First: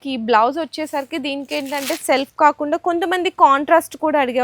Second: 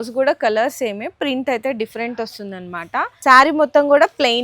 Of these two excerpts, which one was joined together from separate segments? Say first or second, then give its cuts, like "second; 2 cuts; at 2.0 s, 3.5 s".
second; 1 cut; at 3.1 s